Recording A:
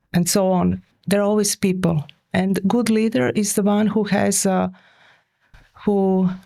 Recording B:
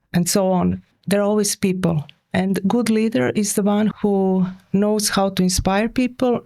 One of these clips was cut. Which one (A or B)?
B